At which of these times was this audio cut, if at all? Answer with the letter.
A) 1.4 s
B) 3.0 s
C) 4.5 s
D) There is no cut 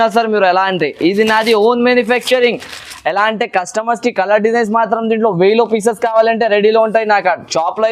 D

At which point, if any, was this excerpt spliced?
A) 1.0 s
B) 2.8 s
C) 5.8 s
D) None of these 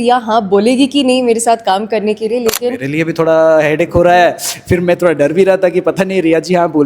B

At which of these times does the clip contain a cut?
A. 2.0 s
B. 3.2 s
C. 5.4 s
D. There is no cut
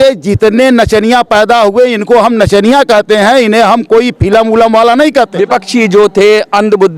C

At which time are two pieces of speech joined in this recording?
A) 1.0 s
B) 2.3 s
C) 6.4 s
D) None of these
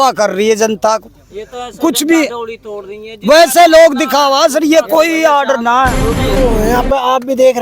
C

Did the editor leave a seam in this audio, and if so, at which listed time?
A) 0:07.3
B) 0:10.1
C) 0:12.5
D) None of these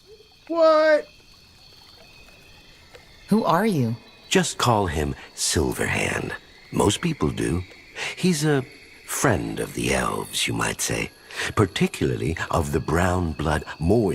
C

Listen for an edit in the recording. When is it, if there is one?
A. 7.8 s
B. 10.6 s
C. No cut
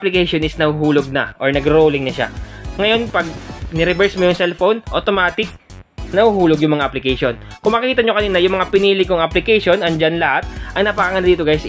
B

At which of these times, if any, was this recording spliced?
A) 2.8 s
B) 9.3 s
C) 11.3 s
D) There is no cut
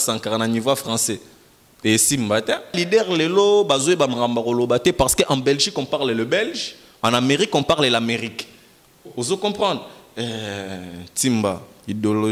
A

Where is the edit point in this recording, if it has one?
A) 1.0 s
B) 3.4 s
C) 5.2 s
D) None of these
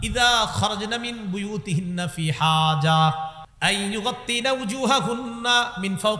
B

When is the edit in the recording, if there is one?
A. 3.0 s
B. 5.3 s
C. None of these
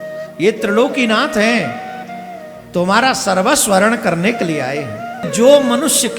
B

